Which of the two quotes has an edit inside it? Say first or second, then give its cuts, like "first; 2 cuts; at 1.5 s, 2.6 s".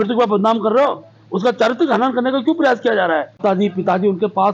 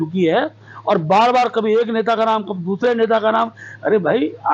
first; 1 cut; at 3.3 s